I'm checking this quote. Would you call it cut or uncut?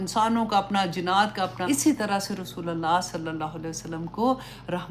cut